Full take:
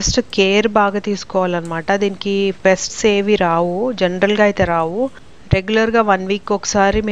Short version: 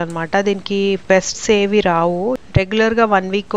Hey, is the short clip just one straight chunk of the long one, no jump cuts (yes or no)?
no